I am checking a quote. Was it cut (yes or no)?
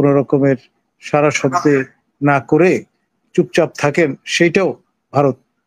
no